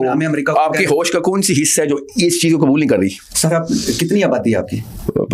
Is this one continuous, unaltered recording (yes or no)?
yes